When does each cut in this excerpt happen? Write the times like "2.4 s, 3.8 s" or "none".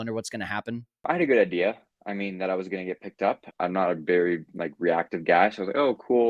1.0 s, 3.5 s